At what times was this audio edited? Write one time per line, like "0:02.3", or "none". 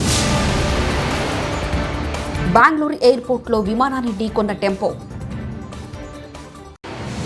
0:02.4